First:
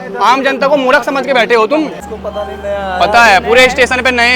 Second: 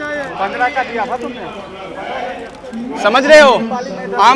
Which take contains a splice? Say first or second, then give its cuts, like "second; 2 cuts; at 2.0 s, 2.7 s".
first; 1 cut; at 2.1 s